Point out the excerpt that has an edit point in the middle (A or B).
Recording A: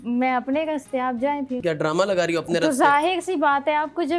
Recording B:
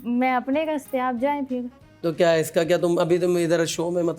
A